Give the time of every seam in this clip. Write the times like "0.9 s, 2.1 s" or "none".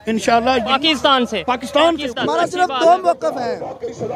2.1 s